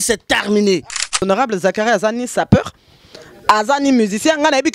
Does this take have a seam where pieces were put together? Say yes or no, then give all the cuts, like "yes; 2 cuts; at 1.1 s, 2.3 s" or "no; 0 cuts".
yes; 1 cut; at 1.2 s